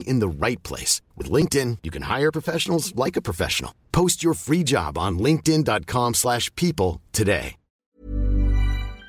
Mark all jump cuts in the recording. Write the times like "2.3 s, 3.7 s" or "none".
8.0 s